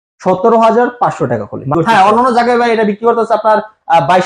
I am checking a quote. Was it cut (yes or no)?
yes